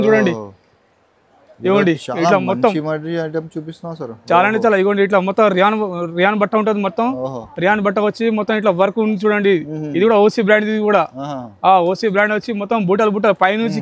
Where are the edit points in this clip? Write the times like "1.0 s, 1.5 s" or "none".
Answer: none